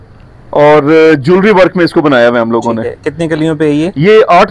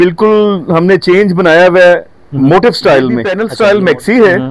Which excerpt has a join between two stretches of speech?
second; 1 cut; at 3.5 s

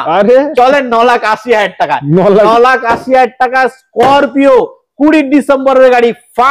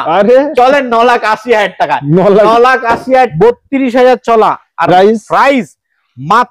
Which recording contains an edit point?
second; 1 cut; at 3.3 s

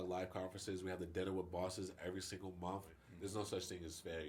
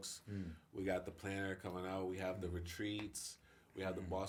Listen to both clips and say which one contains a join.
first; 1 cut; at 3.1 s

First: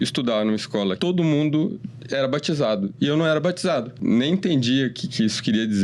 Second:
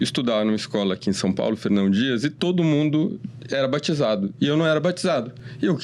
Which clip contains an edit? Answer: first; 2 cuts; at 1.0 s, 4.0 s

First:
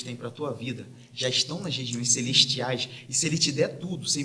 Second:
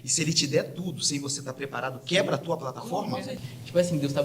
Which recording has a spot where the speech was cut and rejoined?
second; 1 cut; at 3.3 s

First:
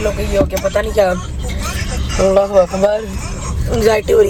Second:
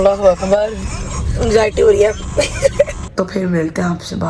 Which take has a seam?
second; 1 cut; at 3.0 s

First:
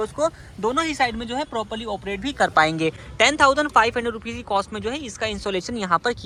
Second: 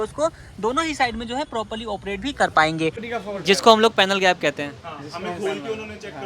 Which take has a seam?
second; 1 cut; at 3.0 s

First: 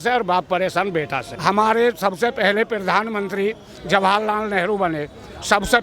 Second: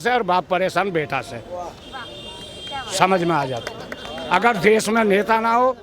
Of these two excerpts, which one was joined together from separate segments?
first; 1 cut; at 1.2 s

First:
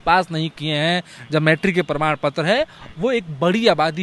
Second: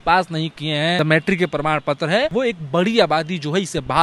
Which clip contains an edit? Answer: second; 2 cuts; at 1.0 s, 2.3 s

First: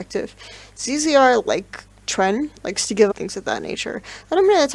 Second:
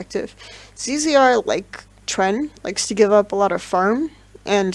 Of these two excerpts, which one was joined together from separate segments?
second; 1 cut; at 3.1 s

